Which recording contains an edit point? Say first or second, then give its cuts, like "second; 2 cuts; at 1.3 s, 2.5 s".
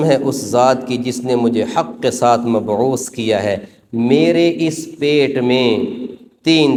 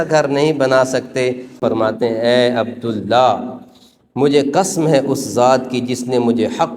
second; 1 cut; at 1.6 s